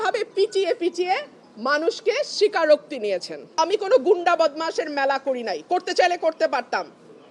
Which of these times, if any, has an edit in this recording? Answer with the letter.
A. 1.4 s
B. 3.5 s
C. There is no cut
B